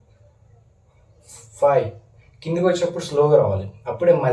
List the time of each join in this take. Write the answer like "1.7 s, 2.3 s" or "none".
none